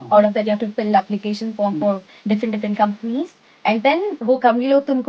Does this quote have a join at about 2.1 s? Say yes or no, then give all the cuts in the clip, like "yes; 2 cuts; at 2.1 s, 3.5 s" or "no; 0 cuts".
no; 0 cuts